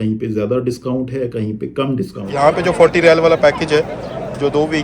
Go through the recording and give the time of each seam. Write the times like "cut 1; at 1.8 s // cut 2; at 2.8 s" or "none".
cut 1; at 2.2 s